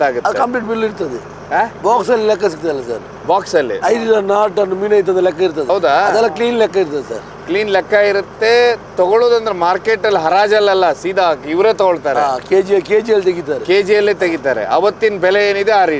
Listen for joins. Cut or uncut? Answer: uncut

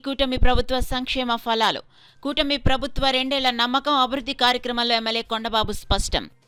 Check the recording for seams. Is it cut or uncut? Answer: uncut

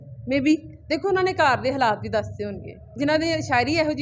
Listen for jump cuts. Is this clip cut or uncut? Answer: uncut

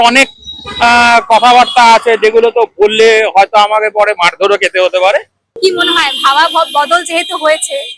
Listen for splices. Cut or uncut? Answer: cut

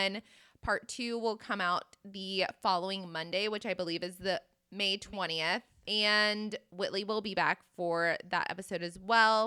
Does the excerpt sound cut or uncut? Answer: cut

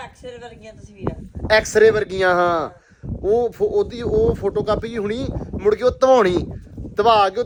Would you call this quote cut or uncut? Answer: uncut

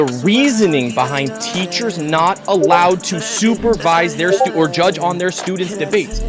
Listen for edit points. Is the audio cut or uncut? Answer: uncut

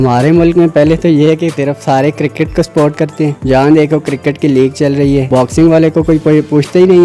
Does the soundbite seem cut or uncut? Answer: cut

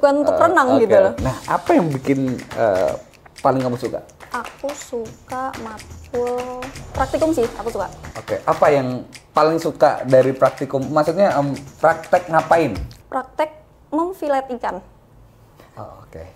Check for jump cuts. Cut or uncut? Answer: cut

